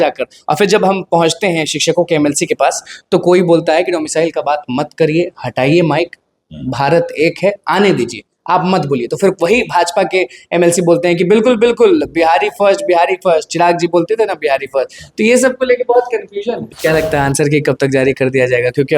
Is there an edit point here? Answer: yes; 1 cut; at 16.6 s

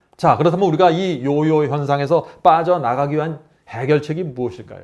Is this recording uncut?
yes; 0 cuts

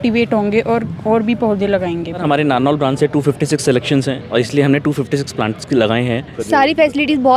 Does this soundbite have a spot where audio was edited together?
yes; 2 cuts; at 2.2 s, 6.3 s

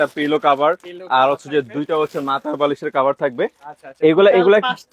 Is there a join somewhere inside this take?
no; 0 cuts

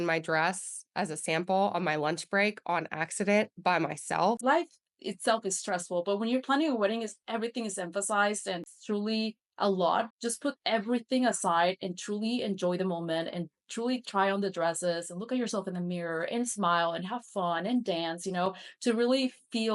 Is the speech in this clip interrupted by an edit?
yes; 3 cuts; at 4.4 s, 8.8 s, 10.2 s

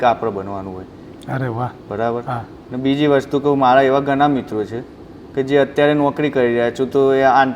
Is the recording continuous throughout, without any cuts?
yes; 0 cuts

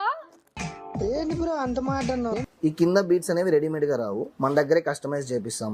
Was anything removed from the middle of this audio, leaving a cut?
yes; 1 cut; at 2.5 s

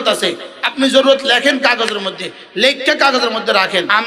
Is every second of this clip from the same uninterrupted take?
yes; 0 cuts

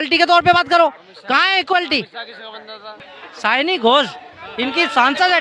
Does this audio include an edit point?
yes; 1 cut; at 3.1 s

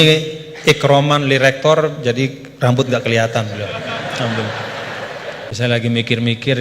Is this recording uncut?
no; 1 cut; at 5.5 s

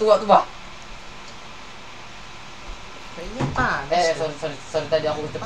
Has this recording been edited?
no; 0 cuts

